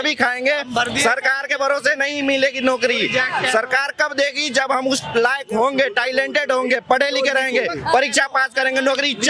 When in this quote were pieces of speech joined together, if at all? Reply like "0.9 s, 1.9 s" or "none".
none